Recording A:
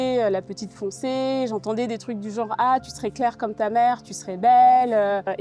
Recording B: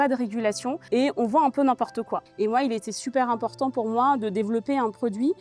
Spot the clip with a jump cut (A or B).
B